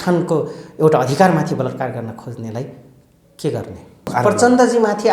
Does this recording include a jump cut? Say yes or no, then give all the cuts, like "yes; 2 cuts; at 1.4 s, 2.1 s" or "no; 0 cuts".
yes; 1 cut; at 4.1 s